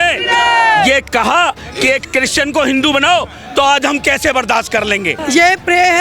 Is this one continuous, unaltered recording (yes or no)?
no